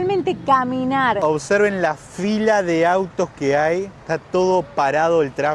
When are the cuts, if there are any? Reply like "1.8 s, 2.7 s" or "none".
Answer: 1.2 s